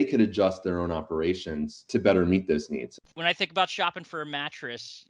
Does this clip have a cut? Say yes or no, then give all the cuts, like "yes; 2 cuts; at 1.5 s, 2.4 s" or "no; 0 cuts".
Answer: yes; 2 cuts; at 1.8 s, 3.0 s